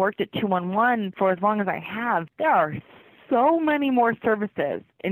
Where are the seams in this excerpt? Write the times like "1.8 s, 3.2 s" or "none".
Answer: 1.1 s